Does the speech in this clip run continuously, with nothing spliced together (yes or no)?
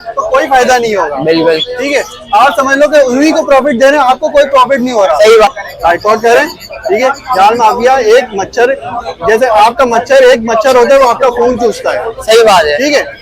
no